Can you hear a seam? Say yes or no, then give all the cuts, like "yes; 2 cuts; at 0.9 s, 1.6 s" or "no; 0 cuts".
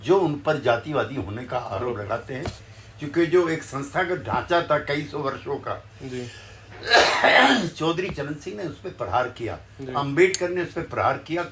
no; 0 cuts